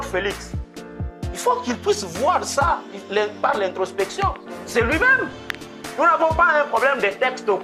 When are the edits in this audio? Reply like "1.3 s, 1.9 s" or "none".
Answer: none

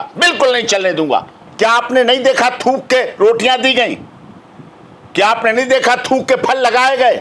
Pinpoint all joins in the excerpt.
1.4 s

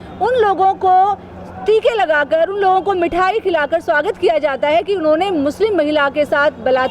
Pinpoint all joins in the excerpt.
none

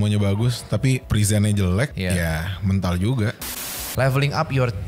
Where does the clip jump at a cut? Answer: 1.0 s, 1.9 s, 3.4 s

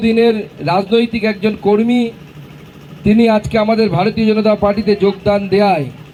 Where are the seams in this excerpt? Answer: none

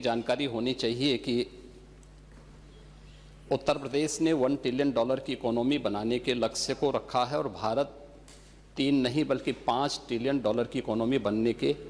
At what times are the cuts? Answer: none

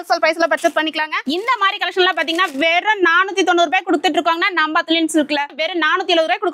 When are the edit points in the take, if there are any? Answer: 1.1 s, 5.6 s

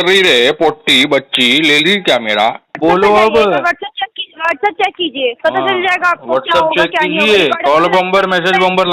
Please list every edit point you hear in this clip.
2.8 s

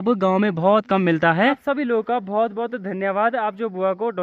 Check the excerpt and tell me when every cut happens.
1.6 s

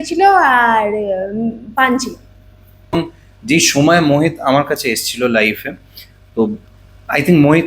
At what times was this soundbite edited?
2.9 s

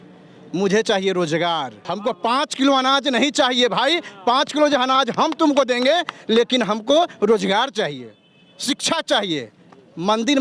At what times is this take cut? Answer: 1.8 s

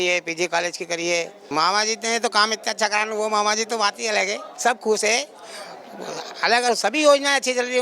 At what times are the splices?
1.4 s

